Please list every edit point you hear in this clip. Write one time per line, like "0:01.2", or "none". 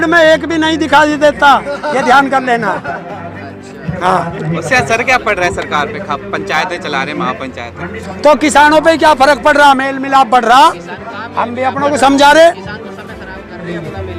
none